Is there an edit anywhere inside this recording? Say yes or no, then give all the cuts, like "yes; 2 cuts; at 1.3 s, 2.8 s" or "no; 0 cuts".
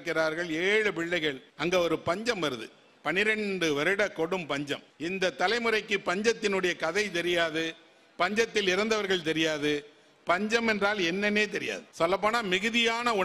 yes; 3 cuts; at 1.5 s, 4.9 s, 11.8 s